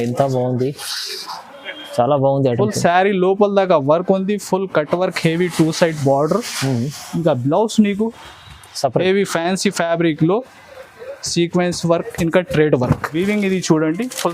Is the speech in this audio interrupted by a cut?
yes; 1 cut; at 13.1 s

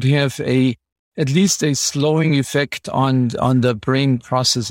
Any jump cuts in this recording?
no; 0 cuts

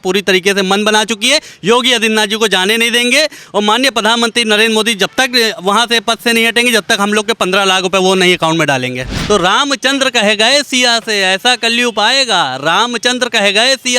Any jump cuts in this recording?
yes; 1 cut; at 9.1 s

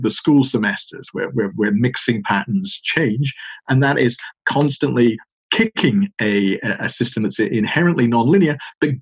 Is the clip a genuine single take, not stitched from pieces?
yes; 0 cuts

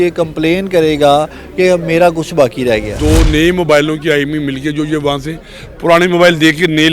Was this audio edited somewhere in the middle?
yes; 1 cut; at 2.9 s

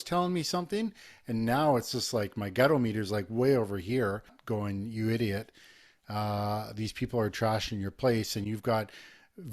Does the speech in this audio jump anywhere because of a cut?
yes; 1 cut; at 4.4 s

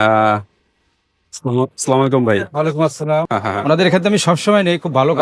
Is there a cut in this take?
yes; 1 cut; at 3.3 s

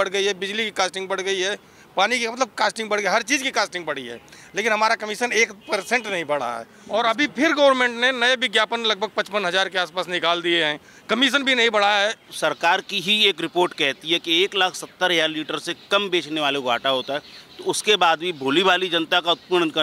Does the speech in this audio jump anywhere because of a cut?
yes; 2 cuts; at 6.7 s, 12.3 s

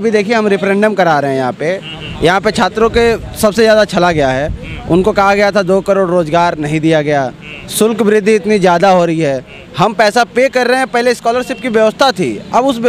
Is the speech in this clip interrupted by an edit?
no; 0 cuts

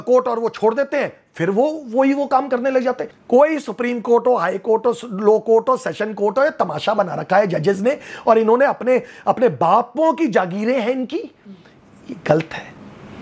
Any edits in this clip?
yes; 1 cut; at 3.1 s

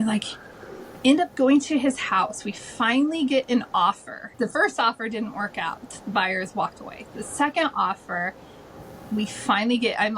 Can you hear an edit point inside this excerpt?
yes; 1 cut; at 4.3 s

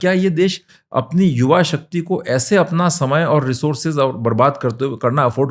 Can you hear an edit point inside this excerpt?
no; 0 cuts

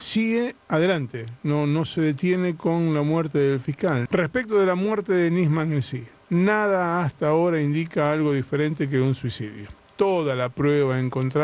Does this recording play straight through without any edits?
no; 1 cut; at 4.0 s

